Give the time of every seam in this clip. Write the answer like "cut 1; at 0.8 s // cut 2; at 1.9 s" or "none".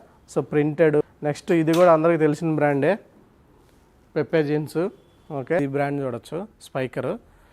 cut 1; at 1.0 s // cut 2; at 5.6 s